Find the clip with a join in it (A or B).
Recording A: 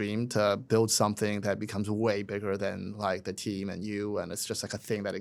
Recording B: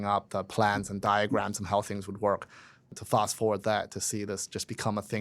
B